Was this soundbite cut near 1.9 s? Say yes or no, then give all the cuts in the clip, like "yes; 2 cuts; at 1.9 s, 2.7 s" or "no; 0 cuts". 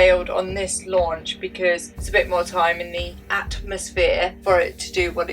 yes; 1 cut; at 1.9 s